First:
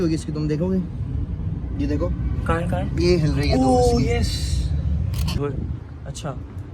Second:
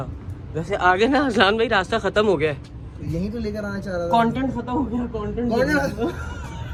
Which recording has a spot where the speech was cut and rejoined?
first; 1 cut; at 5.4 s

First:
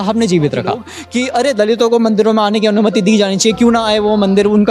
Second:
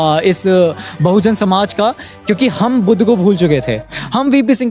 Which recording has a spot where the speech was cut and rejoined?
first; 1 cut; at 1.0 s

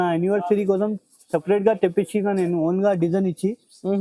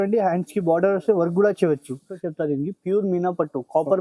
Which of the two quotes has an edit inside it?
second; 1 cut; at 2.2 s

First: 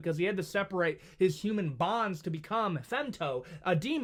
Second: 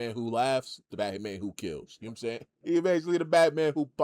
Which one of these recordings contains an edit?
second; 1 cut; at 2.5 s

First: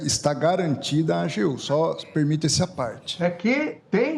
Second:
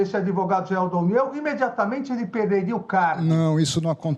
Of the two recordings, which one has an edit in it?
first; 1 cut; at 3.0 s

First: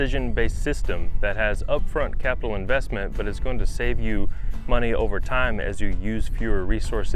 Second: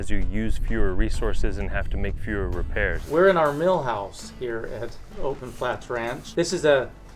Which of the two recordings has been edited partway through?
second; 2 cuts; at 3.0 s, 6.2 s

